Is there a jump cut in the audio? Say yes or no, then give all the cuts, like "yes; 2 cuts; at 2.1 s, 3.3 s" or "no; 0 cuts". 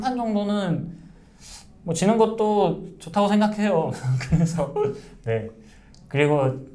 no; 0 cuts